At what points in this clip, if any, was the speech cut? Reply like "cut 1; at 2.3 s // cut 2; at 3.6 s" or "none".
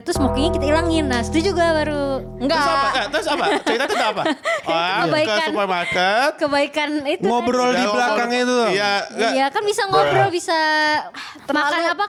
none